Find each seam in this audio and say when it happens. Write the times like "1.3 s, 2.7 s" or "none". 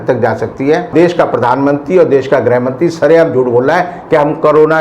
0.9 s